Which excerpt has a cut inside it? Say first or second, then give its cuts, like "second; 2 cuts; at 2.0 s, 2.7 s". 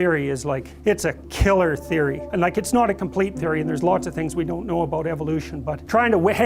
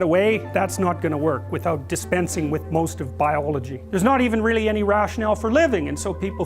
second; 1 cut; at 3.7 s